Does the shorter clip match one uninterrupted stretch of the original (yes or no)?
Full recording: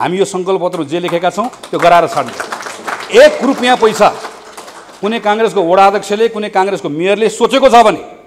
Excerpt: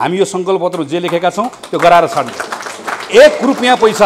yes